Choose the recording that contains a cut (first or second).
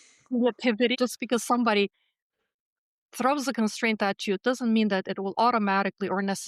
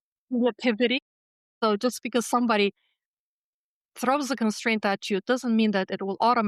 first